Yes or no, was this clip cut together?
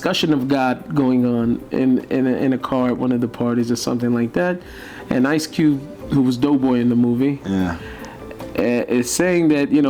no